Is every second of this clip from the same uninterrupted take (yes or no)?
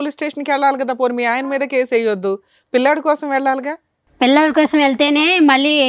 yes